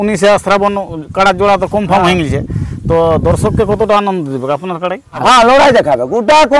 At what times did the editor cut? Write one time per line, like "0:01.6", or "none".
0:05.2